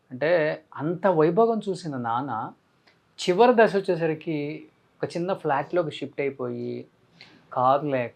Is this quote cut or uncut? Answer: uncut